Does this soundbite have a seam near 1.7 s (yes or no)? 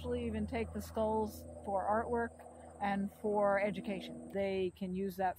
no